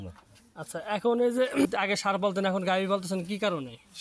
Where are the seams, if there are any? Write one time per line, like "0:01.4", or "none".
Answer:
0:01.7